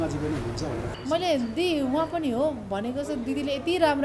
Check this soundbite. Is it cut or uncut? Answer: cut